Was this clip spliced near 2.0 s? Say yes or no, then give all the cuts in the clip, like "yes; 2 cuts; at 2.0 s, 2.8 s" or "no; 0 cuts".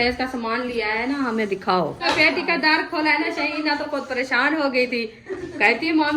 yes; 1 cut; at 2.0 s